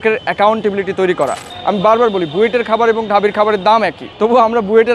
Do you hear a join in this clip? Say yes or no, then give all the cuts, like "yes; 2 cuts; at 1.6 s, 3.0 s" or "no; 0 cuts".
yes; 2 cuts; at 1.5 s, 4.0 s